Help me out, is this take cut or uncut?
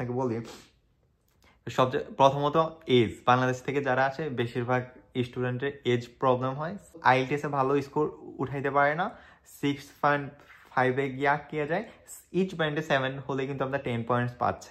cut